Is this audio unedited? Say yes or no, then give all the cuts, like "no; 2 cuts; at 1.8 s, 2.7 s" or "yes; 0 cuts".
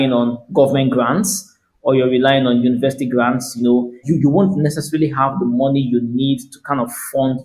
no; 1 cut; at 4.0 s